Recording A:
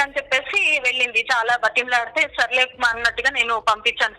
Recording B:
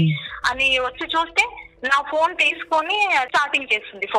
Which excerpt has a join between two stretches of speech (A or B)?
B